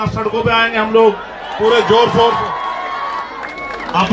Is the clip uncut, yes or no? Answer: yes